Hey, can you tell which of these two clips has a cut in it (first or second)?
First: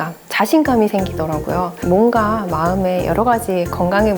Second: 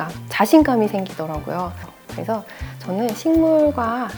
first